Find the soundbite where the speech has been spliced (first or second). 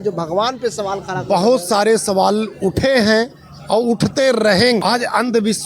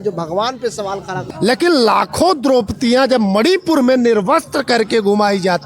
second